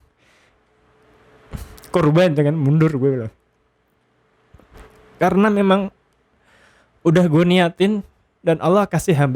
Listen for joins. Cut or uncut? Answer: uncut